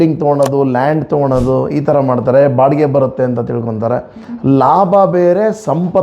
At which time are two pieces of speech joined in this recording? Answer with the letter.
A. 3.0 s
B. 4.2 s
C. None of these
B